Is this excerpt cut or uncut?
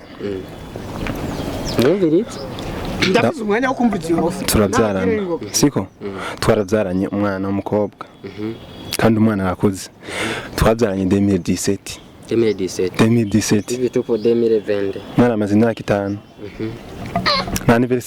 uncut